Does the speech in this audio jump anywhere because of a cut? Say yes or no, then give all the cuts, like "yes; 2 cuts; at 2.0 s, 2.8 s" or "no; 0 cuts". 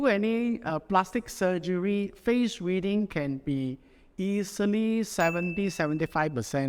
no; 0 cuts